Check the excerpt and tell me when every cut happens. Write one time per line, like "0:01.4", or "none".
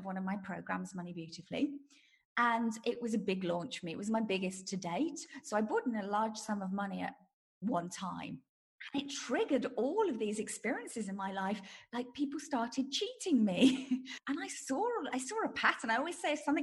0:08.5
0:14.1